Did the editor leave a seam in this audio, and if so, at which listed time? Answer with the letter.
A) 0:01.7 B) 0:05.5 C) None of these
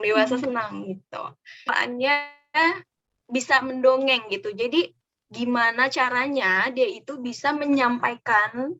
A